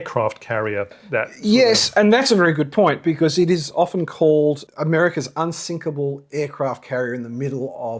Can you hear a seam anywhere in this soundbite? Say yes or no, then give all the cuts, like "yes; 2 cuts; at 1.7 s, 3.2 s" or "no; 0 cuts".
yes; 1 cut; at 0.9 s